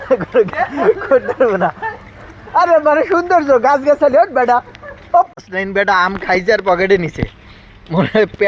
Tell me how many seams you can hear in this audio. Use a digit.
1